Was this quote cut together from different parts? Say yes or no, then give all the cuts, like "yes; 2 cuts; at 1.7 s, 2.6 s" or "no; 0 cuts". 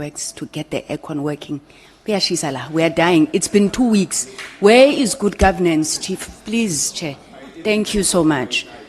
no; 0 cuts